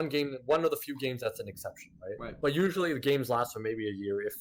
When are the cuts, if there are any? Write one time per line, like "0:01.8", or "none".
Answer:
none